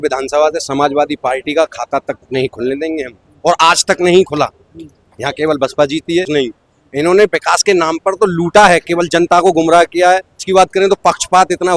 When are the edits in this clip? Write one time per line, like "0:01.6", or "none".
0:06.3
0:10.4